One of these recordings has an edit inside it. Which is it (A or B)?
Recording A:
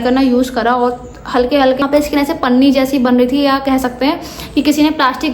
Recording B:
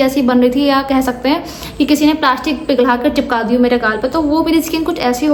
A